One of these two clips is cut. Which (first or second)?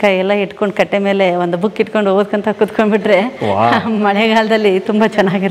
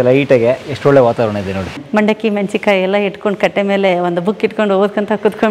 second